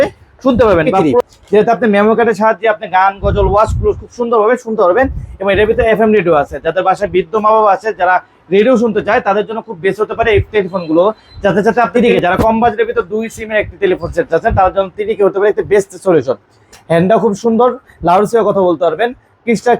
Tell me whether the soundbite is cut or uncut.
cut